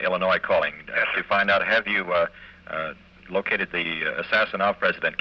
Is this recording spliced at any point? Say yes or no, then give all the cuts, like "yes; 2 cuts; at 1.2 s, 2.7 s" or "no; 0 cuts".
no; 0 cuts